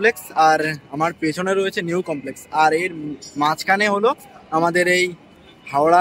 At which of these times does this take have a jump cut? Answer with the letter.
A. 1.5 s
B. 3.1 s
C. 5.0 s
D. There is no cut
D